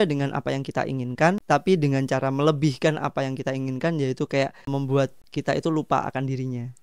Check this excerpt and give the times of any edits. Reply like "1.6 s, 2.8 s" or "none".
1.4 s, 4.9 s